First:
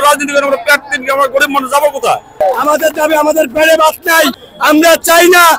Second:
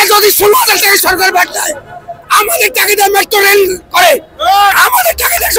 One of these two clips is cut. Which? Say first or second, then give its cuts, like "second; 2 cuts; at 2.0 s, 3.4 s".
first; 2 cuts; at 2.4 s, 4.4 s